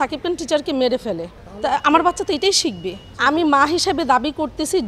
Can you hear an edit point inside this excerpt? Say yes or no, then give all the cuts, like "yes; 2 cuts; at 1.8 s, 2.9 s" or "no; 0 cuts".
no; 0 cuts